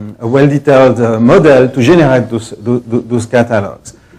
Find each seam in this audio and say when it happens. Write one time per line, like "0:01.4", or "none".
0:01.1